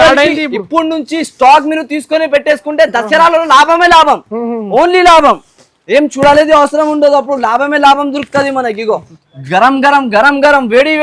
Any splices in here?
yes; 1 cut; at 9.2 s

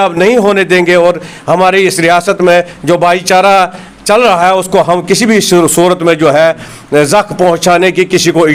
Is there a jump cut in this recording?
no; 0 cuts

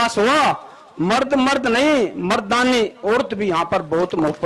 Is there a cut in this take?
no; 0 cuts

